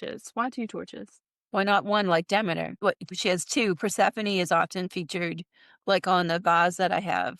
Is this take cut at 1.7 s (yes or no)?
no